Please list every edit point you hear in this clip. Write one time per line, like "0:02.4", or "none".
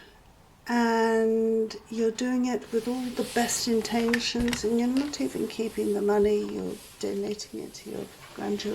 none